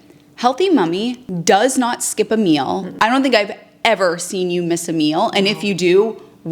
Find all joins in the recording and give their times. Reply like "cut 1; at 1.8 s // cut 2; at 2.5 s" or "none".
cut 1; at 1.3 s // cut 2; at 2.9 s